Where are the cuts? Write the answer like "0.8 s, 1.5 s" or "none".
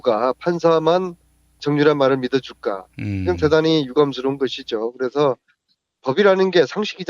4.6 s